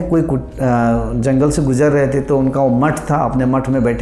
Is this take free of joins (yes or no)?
yes